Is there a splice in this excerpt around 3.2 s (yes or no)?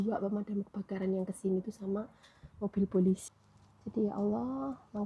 yes